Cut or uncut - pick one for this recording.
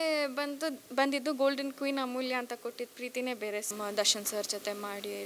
cut